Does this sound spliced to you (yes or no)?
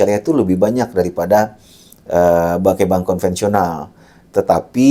no